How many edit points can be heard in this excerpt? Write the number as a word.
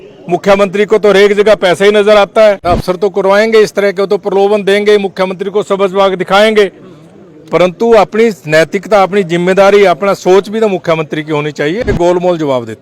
two